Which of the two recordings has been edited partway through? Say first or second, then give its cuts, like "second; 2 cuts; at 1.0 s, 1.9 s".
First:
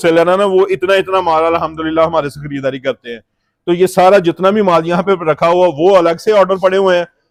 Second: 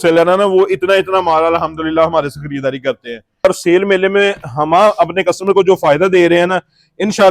second; 1 cut; at 3.5 s